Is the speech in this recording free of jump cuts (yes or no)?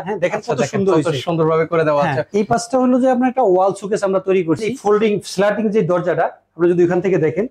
no